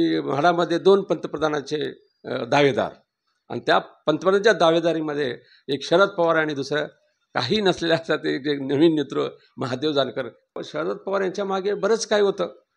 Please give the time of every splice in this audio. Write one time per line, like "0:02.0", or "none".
0:10.5